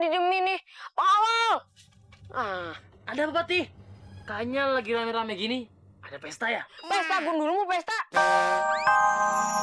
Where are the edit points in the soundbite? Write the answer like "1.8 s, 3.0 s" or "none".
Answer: 8.1 s